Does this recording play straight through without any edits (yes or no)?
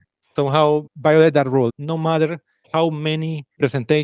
no